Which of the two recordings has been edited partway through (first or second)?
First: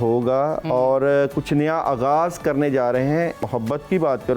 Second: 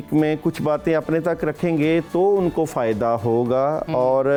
first